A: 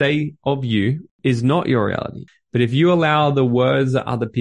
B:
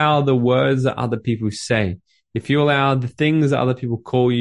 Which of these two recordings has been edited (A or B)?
A